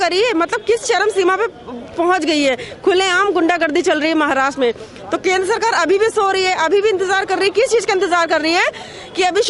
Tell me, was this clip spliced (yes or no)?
no